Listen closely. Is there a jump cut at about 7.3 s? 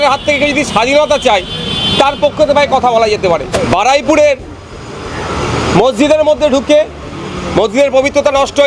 no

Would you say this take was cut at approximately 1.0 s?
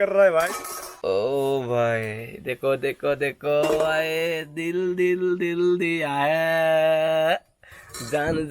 no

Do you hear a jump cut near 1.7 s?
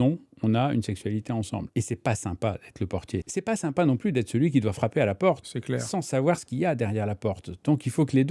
yes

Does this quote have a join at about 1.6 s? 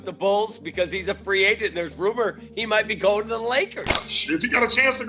no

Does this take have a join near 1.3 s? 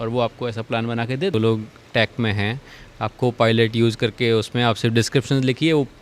yes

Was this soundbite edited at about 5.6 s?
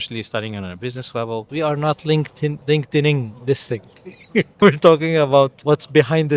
yes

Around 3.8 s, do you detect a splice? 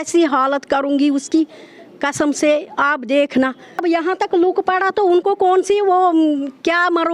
yes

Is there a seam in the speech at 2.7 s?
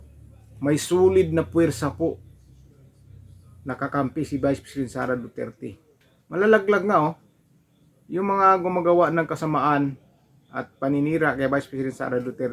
no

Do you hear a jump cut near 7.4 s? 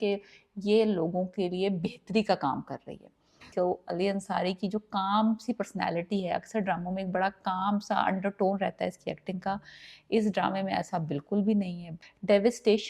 no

